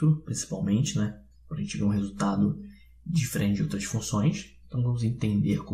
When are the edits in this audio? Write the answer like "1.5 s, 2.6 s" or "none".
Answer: 4.4 s

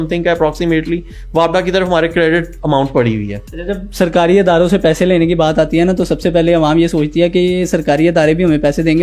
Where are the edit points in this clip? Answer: none

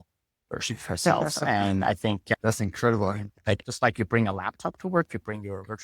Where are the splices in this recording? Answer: 2.3 s, 3.6 s

